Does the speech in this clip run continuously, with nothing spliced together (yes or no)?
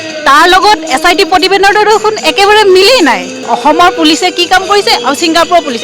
no